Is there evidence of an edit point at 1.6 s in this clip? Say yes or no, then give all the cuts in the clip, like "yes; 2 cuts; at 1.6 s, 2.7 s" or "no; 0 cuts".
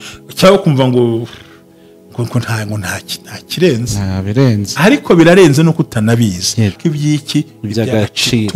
no; 1 cut; at 6.8 s